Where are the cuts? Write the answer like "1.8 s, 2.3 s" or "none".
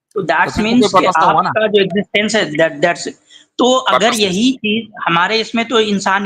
none